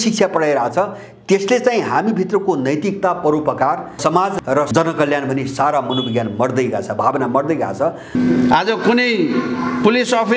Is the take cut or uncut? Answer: cut